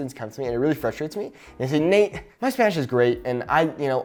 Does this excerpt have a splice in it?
no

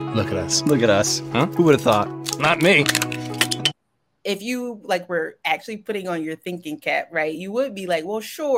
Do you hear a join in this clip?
yes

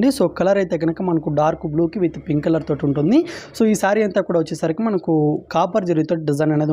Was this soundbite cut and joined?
no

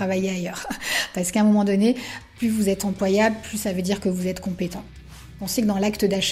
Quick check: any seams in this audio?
yes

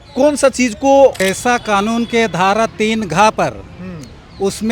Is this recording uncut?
no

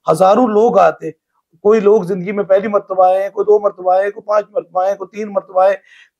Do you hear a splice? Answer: no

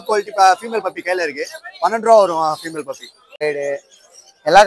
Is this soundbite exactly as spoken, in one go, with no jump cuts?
no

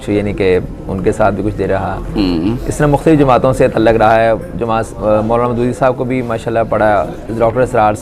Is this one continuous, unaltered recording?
yes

